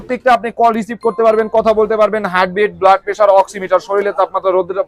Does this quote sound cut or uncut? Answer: uncut